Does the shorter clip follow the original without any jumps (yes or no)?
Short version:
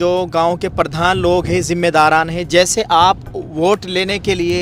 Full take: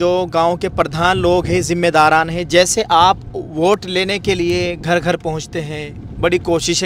yes